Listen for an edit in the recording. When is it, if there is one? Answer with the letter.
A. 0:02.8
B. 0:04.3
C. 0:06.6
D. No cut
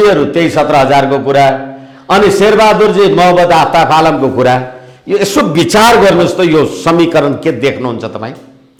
D